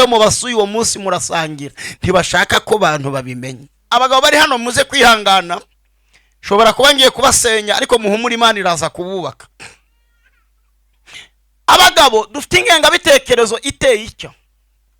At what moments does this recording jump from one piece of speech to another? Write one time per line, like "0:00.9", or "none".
0:03.8